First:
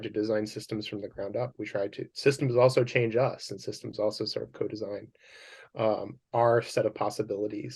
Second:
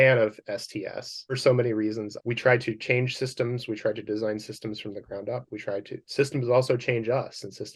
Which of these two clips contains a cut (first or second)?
second